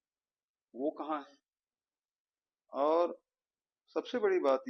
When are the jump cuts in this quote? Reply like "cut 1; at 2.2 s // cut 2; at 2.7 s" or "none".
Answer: none